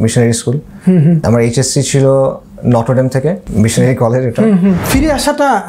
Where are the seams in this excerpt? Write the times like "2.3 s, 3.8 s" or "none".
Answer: 1.2 s, 3.4 s, 4.8 s